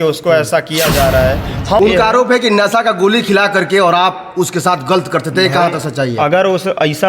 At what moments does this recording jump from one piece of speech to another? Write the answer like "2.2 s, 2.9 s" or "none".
1.8 s

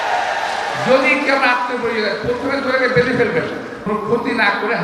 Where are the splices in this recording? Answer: 3.7 s

